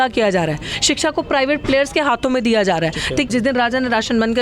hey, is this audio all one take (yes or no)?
no